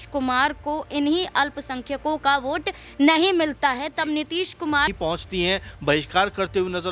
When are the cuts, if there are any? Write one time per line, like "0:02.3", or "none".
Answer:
0:04.9